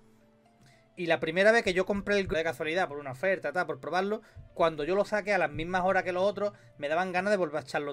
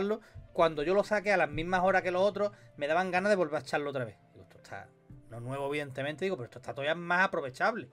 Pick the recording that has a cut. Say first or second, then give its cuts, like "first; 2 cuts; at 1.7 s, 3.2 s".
first; 1 cut; at 2.3 s